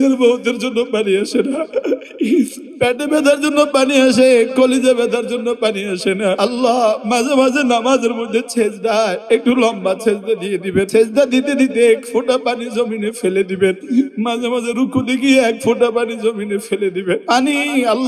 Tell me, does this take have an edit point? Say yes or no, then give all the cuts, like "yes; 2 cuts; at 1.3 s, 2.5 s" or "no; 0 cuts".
yes; 6 cuts; at 1.7 s, 6.4 s, 9.2 s, 10.9 s, 13.8 s, 17.2 s